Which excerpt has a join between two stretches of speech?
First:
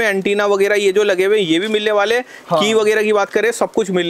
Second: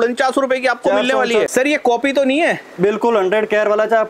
second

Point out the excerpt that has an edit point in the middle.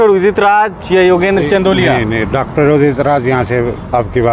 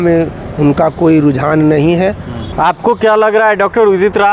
second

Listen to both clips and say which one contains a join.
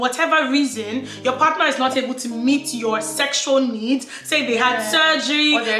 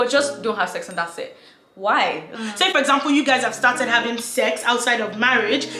second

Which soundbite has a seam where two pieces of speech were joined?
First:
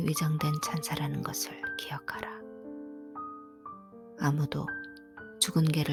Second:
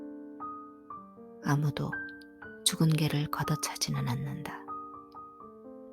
second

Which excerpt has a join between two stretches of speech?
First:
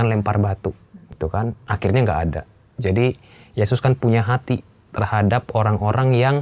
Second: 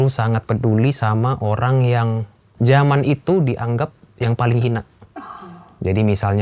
first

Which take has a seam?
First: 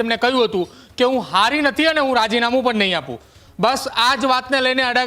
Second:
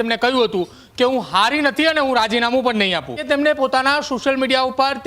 second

